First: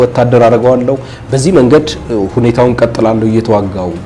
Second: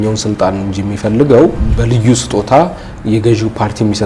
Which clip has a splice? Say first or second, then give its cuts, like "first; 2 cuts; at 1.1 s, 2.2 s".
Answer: second; 1 cut; at 1.6 s